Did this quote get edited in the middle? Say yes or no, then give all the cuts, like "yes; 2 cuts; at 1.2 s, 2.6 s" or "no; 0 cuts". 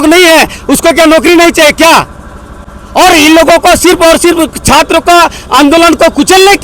no; 0 cuts